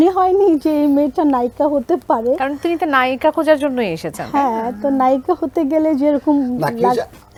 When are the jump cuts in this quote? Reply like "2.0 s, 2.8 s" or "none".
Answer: none